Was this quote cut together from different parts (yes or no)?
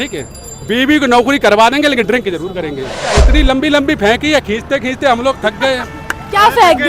yes